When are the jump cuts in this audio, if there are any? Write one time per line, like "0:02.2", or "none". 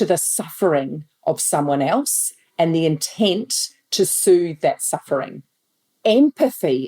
0:06.0